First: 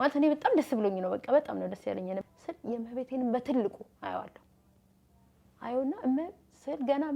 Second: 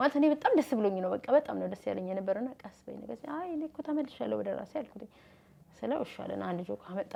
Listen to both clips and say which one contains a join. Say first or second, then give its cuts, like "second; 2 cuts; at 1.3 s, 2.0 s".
first; 1 cut; at 2.2 s